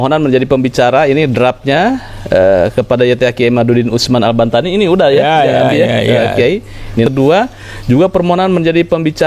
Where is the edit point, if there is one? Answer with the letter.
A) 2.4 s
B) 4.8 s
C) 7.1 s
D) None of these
C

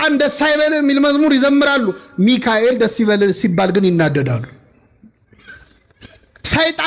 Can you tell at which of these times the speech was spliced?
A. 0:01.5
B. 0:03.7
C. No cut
C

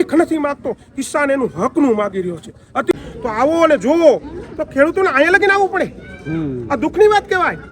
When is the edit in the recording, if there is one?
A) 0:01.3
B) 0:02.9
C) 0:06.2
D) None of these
B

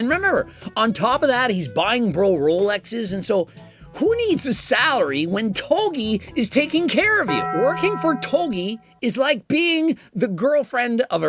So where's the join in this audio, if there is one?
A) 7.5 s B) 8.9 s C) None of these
A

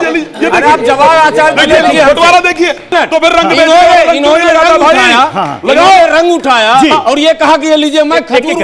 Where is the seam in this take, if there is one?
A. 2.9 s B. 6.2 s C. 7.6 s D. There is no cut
A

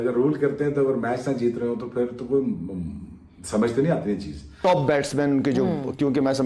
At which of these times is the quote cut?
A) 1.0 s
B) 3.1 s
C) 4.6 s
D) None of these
C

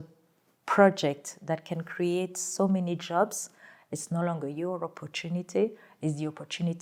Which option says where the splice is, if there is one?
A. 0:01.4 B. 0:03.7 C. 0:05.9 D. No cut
D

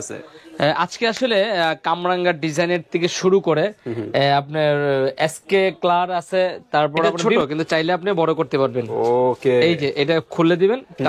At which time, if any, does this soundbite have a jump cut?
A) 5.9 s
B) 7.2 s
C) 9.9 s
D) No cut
B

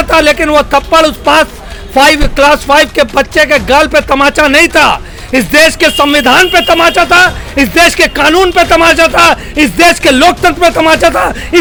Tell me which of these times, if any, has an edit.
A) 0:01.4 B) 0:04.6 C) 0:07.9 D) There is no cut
D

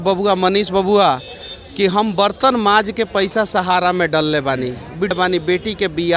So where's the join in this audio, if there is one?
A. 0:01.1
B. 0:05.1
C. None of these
B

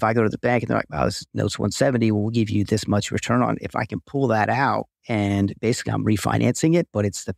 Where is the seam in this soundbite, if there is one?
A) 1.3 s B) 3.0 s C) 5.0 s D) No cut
C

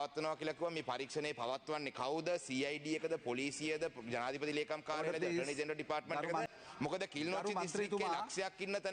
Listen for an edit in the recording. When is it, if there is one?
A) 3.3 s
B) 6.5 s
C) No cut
B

